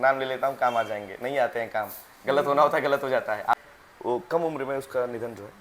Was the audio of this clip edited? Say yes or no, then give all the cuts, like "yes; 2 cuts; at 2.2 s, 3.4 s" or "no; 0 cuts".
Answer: yes; 1 cut; at 3.5 s